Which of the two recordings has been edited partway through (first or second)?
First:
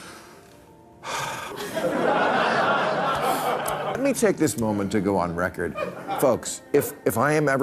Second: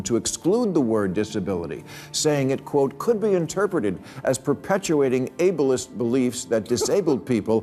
first